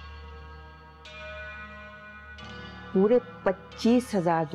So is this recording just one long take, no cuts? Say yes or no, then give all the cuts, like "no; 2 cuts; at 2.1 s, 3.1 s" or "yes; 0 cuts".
no; 1 cut; at 2.9 s